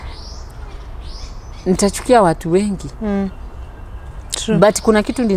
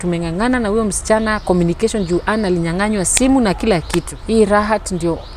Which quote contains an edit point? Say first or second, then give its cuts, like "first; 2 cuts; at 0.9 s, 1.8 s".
second; 1 cut; at 4.1 s